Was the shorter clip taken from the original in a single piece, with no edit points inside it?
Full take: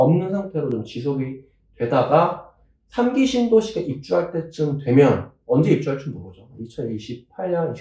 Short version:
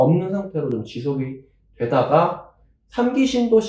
yes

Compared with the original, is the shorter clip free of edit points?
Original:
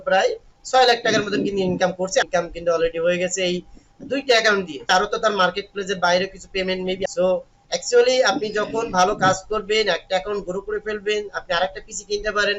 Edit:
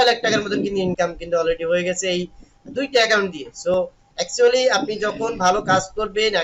no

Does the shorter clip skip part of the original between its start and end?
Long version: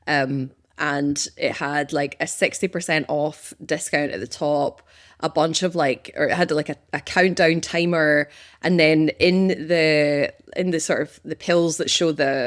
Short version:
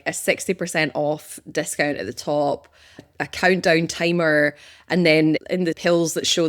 yes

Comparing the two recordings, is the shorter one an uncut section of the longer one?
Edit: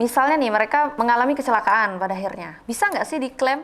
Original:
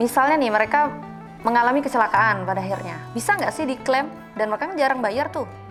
no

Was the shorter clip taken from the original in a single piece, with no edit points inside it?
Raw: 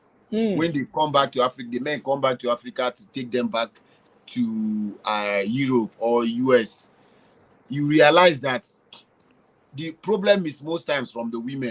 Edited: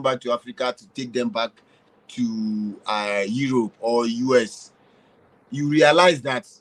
yes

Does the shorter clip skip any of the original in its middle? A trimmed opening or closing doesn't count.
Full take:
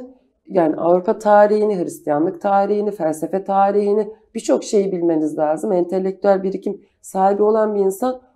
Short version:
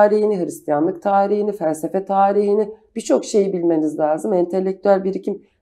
no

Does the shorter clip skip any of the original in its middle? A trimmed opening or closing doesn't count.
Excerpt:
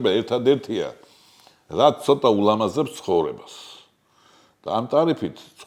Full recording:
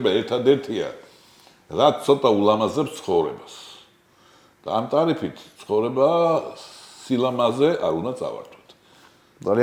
no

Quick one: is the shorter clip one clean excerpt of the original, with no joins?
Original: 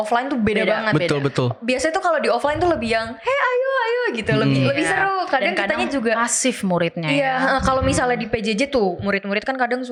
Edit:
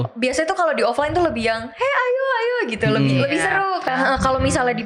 no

